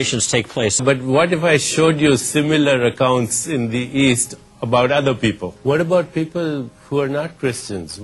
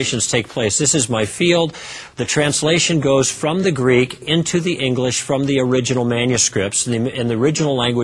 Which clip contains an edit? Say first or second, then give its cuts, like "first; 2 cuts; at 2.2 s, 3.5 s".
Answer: first; 2 cuts; at 0.8 s, 5.5 s